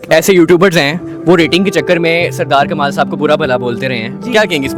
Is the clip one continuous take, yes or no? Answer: yes